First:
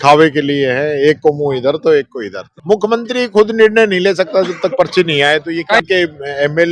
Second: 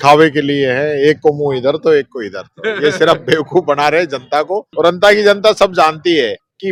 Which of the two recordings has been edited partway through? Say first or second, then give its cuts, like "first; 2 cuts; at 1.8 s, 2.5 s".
first; 2 cuts; at 2.5 s, 5.8 s